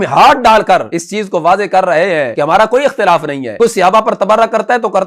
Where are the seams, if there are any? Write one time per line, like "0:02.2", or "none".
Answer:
0:01.0
0:02.3
0:03.4